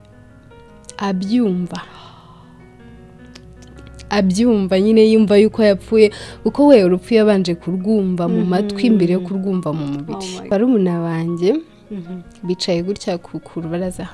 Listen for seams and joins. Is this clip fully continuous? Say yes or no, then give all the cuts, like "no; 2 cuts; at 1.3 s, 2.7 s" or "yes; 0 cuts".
no; 1 cut; at 10.4 s